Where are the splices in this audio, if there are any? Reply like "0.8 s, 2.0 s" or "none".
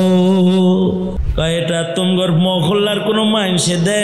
1.2 s